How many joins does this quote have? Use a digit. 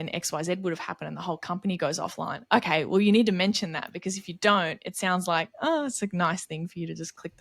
0